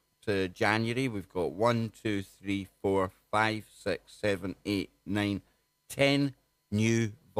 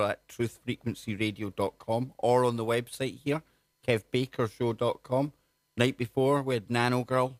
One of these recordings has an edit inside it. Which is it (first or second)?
second